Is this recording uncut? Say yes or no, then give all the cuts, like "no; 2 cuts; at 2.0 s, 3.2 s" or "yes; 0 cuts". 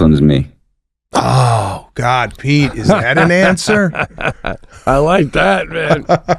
yes; 0 cuts